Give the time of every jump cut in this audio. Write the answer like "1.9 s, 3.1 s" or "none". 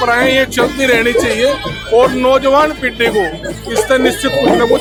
none